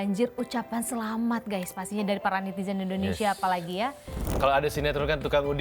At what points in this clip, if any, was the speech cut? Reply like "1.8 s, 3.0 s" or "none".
4.3 s